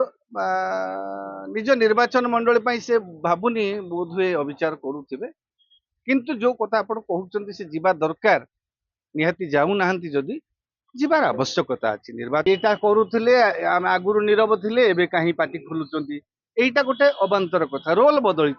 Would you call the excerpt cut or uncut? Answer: cut